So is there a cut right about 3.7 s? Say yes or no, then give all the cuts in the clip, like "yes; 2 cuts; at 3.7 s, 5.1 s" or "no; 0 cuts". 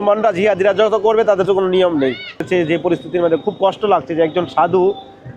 no; 1 cut; at 2.5 s